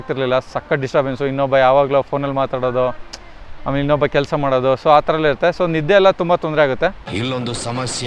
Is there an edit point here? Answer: no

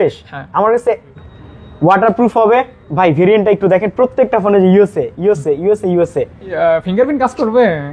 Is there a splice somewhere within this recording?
yes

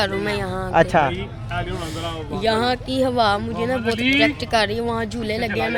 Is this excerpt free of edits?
yes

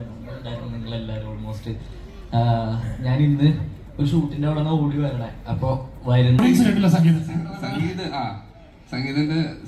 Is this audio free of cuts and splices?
no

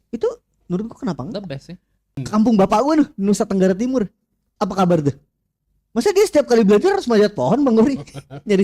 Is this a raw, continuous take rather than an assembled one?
no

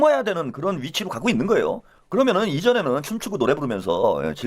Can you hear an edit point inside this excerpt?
yes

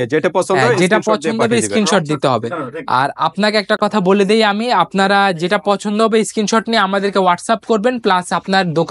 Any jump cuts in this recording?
no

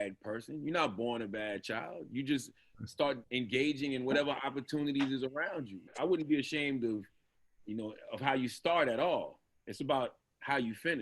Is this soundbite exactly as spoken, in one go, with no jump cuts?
no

